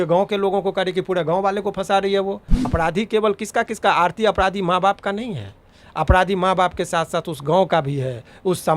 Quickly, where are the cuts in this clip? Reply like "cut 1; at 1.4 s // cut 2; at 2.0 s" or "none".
cut 1; at 2.6 s